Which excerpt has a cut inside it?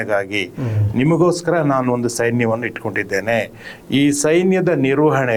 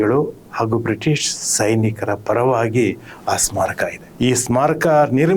second; 1 cut; at 4.0 s

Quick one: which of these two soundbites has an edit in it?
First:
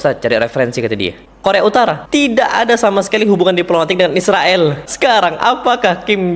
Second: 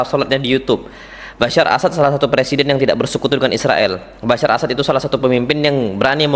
first; 3 cuts; at 1.2 s, 2.0 s, 4.9 s

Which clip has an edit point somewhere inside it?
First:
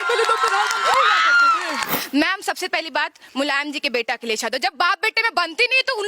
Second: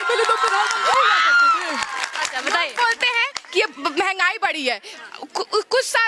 first; 1 cut; at 1.9 s

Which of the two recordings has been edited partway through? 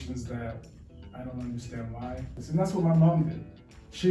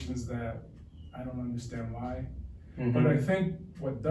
first; 1 cut; at 2.4 s

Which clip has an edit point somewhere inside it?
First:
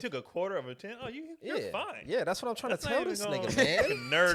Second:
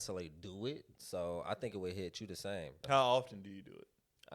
second; 1 cut; at 2.8 s

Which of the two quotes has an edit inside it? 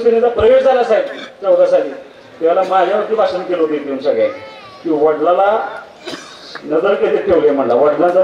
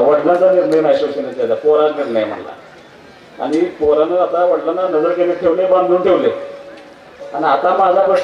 second; 1 cut; at 7.2 s

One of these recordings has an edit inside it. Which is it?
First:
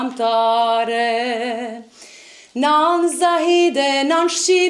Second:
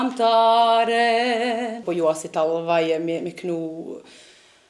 second; 1 cut; at 1.8 s

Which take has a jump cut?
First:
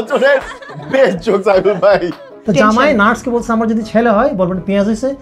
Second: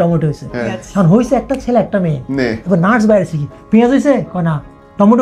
first; 1 cut; at 2.4 s

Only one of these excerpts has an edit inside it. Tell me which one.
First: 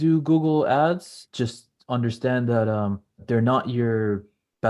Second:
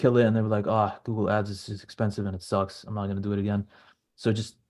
first; 2 cuts; at 1.2 s, 3.2 s

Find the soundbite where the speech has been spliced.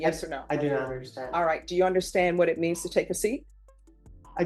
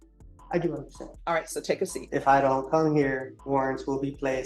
second; 2 cuts; at 2.0 s, 3.3 s

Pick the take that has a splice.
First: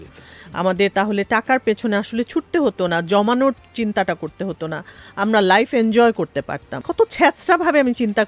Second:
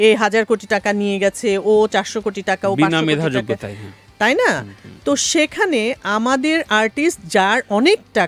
first; 1 cut; at 6.9 s

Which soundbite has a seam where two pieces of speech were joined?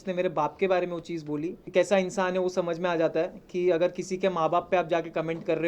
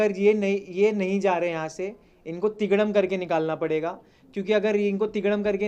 first; 1 cut; at 1.6 s

